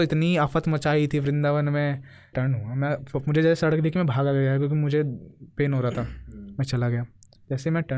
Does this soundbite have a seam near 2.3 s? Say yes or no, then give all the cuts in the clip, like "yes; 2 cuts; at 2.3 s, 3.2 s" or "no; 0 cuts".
yes; 1 cut; at 2.3 s